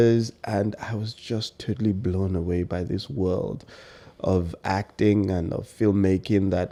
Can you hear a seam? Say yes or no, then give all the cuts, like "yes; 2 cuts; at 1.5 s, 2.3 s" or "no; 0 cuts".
no; 0 cuts